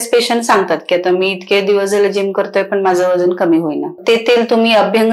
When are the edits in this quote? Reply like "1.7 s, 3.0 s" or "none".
3.9 s